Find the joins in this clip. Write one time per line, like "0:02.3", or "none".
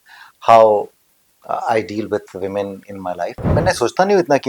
0:03.5